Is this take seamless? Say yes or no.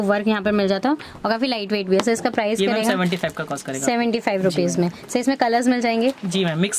yes